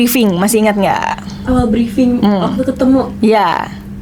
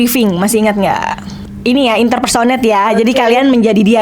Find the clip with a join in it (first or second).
second